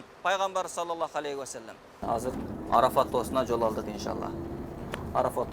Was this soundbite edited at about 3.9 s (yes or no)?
no